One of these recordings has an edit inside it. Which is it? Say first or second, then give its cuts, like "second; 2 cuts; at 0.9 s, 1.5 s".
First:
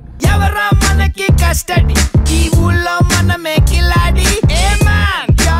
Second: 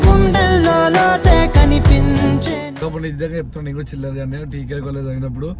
second; 1 cut; at 2.8 s